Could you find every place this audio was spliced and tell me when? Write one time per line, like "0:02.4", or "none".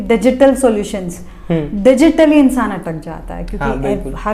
none